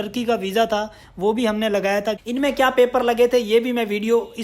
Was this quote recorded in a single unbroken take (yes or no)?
no